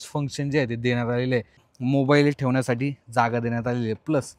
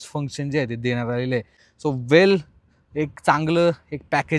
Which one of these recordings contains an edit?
first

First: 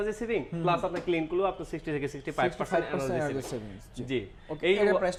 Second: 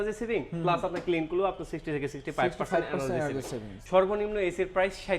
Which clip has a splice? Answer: second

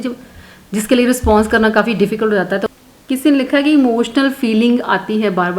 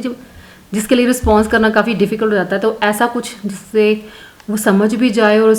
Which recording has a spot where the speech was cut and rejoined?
first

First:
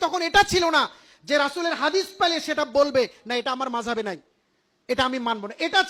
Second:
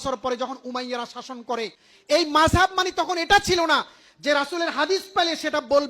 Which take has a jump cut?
second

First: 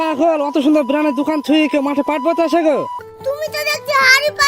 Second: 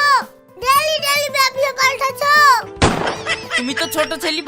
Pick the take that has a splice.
first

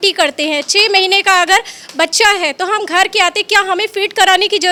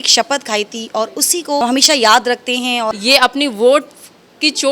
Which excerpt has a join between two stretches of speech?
second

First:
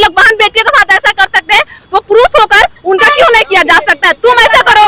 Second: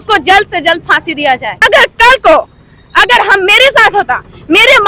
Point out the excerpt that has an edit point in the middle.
second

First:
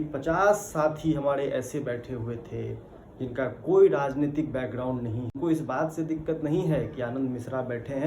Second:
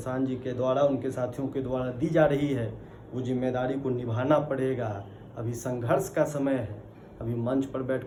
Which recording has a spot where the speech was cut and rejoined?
first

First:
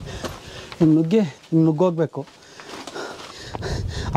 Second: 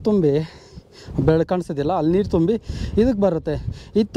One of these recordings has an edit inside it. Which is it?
first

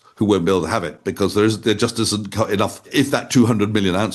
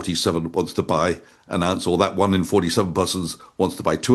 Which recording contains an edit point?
first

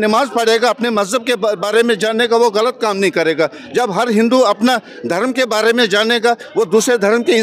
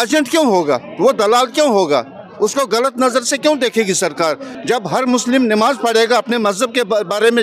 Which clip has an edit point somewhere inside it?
second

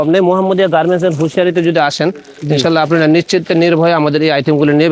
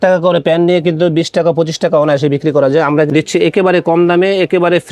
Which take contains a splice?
second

